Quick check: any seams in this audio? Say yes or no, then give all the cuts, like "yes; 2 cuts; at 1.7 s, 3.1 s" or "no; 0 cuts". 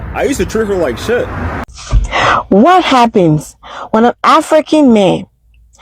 yes; 1 cut; at 1.7 s